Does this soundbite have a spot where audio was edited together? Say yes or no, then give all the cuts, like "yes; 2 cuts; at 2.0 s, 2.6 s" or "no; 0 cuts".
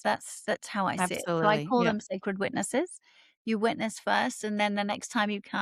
no; 0 cuts